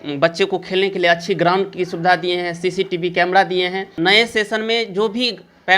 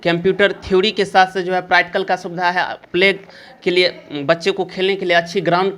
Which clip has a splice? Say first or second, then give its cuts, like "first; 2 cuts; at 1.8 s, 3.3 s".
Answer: first; 1 cut; at 3.9 s